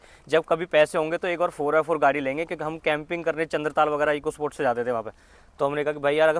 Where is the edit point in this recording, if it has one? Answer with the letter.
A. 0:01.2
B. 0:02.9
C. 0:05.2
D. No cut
D